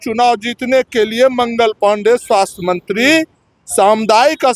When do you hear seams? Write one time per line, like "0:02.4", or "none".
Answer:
none